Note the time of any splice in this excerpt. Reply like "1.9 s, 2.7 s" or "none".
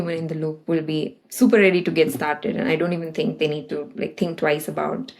1.2 s